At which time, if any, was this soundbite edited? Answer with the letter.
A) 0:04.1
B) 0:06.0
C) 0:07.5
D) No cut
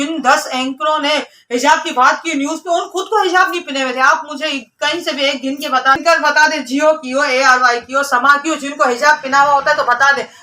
B